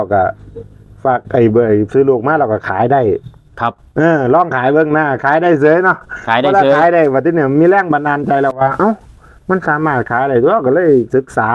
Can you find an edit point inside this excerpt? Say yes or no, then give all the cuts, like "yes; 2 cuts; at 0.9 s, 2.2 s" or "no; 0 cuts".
no; 0 cuts